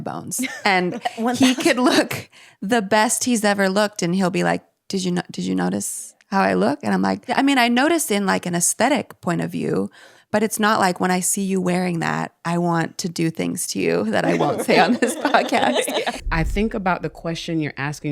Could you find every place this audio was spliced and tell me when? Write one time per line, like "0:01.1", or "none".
0:07.3
0:16.2